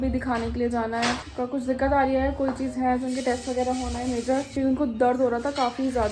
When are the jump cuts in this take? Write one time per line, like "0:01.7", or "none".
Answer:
0:01.3
0:04.5